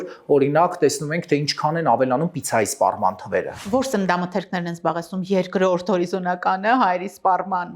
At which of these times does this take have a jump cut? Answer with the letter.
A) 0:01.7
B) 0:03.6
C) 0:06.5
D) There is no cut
B